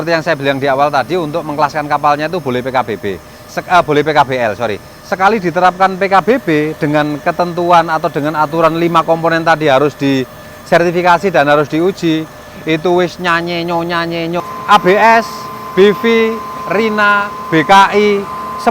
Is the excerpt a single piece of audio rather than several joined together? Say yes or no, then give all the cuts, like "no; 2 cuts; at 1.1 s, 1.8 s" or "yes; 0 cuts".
no; 1 cut; at 14.4 s